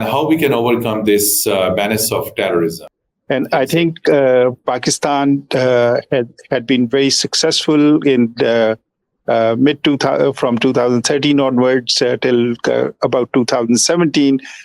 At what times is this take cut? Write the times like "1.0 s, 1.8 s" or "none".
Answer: 2.9 s